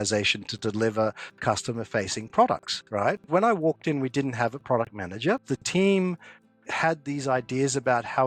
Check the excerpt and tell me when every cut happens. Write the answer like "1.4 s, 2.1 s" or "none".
3.3 s, 5.5 s